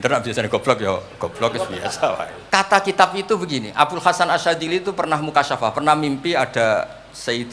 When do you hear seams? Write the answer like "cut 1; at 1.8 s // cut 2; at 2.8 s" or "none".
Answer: cut 1; at 2.4 s